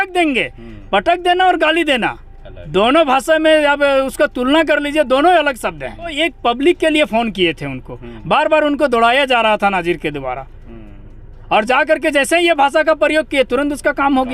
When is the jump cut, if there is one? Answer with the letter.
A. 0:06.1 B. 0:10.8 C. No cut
A